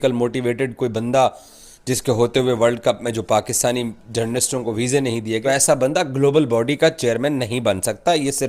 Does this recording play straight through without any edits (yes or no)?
no